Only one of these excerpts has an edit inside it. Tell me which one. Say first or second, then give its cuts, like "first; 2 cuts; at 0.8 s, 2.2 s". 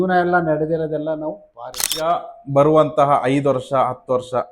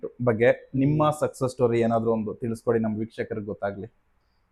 first; 1 cut; at 2.1 s